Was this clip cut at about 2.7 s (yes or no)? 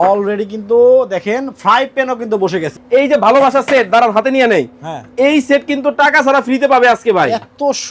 yes